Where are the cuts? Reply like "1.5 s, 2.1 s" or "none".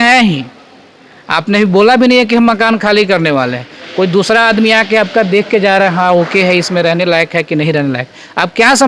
none